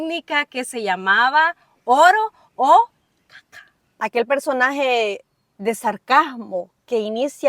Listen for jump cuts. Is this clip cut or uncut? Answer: cut